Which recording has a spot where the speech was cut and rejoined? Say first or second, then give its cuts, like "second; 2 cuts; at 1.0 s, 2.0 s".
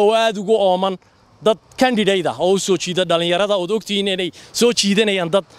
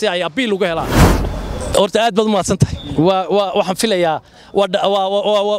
second; 1 cut; at 1.0 s